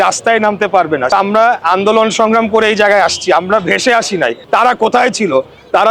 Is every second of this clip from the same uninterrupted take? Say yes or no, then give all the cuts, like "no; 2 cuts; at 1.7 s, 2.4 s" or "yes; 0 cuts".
no; 2 cuts; at 1.1 s, 4.4 s